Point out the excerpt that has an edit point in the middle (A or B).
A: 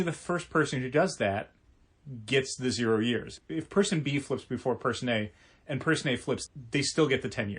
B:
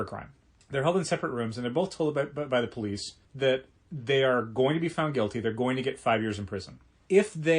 A